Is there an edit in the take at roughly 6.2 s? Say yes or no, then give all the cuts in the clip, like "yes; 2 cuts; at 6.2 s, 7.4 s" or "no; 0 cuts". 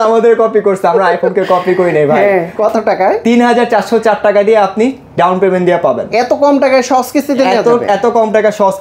no; 1 cut; at 2.5 s